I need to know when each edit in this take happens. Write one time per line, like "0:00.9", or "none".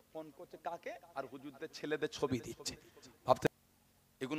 0:03.5